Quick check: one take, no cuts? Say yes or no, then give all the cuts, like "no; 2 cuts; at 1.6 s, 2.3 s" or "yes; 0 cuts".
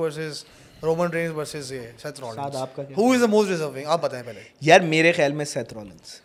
yes; 0 cuts